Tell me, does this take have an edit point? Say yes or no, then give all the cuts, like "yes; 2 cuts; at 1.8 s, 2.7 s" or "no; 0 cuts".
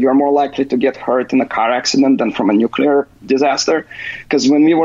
no; 0 cuts